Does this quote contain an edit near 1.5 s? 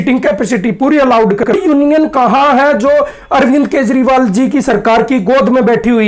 yes; 1 cut; at 1.5 s

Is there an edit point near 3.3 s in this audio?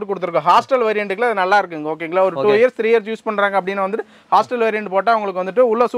no; 0 cuts

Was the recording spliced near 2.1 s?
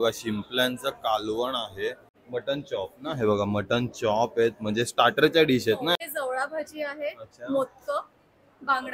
yes; 2 cuts; at 2.1 s, 6.0 s

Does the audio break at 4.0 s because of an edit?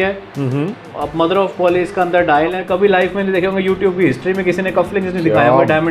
no; 1 cut; at 2.6 s

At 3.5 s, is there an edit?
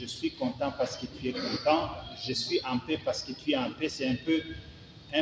no; 1 cut; at 2.2 s

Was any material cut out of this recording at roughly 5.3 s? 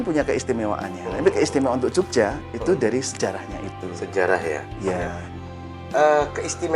yes; 1 cut; at 5.3 s

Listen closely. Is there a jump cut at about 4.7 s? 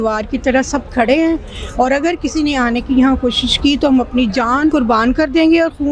yes; 1 cut; at 4.7 s

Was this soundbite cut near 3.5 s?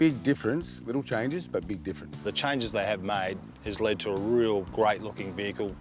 no; 2 cuts; at 2.2 s, 4.7 s

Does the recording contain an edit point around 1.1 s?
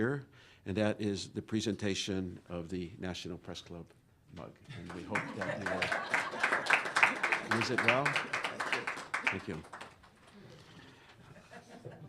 no; 1 cut; at 7.6 s

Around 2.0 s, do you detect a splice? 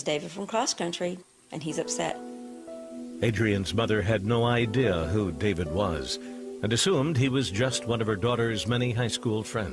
no; 0 cuts

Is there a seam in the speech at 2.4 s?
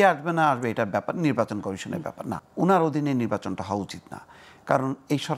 yes; 1 cut; at 2.4 s

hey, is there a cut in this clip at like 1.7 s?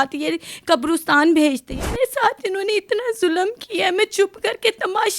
yes; 1 cut; at 1.7 s

